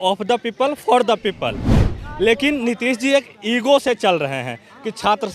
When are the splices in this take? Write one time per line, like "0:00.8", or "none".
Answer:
0:01.9